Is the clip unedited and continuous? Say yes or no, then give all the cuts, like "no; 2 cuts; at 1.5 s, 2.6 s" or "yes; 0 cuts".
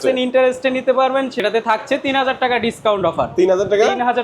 no; 1 cut; at 1.4 s